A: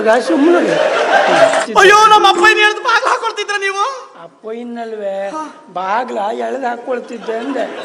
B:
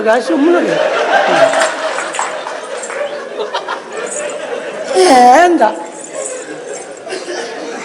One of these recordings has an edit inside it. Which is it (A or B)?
A